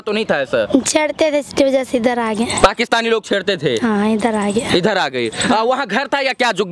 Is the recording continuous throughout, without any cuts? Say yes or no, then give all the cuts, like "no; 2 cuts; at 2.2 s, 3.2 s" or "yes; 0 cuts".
yes; 0 cuts